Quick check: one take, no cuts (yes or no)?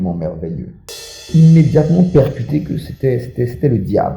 no